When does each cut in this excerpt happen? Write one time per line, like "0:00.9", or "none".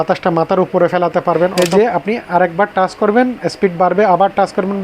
0:01.5